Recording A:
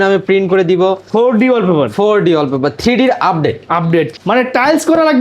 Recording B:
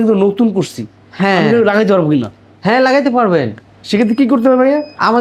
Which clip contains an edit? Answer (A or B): A